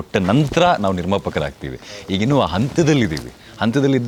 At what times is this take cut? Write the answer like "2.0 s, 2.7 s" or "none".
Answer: none